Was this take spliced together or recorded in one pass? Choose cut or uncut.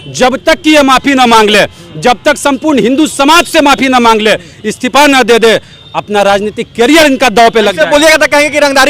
uncut